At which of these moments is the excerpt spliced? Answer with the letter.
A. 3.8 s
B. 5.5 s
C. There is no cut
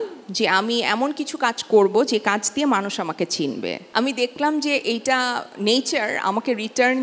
A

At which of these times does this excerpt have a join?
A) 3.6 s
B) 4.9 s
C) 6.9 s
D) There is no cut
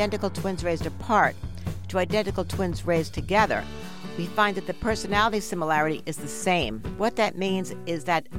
C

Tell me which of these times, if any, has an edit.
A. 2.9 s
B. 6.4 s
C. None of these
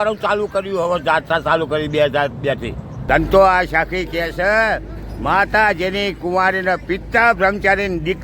A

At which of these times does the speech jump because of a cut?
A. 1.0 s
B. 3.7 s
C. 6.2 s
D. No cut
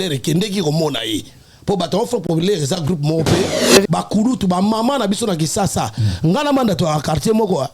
B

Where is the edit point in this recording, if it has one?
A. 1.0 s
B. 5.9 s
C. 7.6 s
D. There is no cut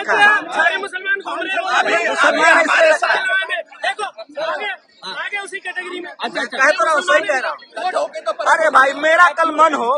C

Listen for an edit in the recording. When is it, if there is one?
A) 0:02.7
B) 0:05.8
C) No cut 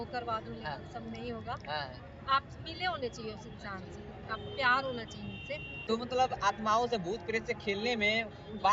B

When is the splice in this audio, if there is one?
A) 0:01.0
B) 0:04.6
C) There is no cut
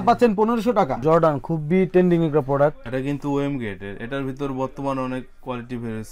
A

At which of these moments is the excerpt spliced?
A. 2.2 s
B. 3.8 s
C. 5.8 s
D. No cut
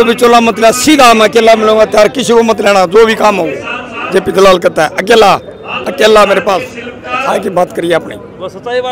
D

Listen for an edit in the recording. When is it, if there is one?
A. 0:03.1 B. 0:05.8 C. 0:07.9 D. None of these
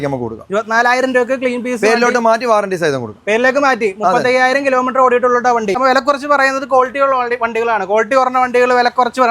B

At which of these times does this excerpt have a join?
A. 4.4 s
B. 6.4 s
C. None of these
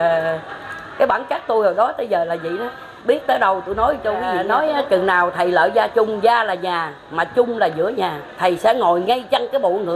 A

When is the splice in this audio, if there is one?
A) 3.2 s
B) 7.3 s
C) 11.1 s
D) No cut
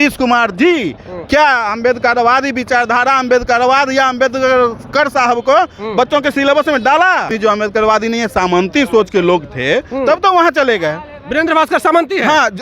B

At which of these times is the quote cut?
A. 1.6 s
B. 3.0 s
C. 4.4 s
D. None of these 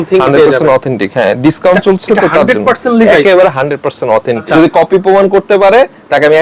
C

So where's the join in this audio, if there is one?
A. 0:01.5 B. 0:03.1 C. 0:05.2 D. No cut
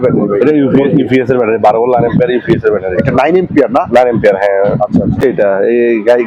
C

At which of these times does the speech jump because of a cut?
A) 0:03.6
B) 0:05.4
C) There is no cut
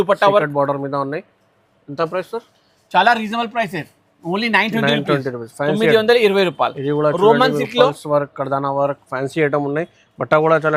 C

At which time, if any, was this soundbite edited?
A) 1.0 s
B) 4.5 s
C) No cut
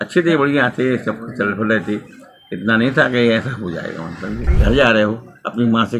B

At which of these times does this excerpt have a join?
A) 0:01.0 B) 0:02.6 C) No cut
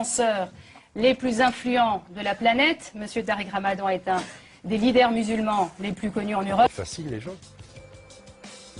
C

